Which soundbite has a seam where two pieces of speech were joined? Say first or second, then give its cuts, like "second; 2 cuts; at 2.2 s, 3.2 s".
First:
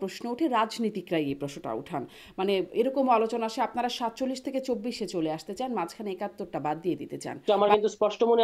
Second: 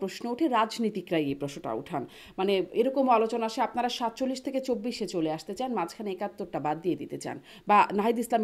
first; 1 cut; at 7.4 s